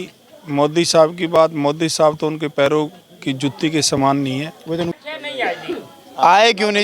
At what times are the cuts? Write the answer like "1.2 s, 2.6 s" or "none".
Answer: 4.9 s